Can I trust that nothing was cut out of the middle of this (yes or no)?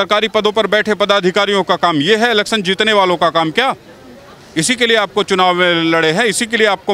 yes